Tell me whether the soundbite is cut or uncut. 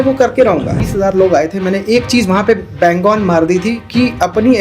cut